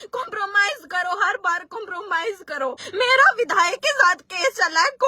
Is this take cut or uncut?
cut